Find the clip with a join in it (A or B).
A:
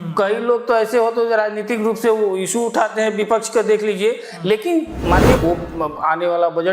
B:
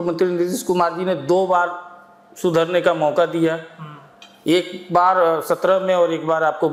A